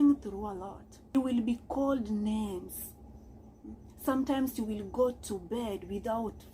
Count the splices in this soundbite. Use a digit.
1